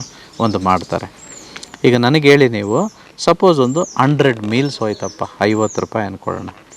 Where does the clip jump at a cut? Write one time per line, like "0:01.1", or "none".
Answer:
none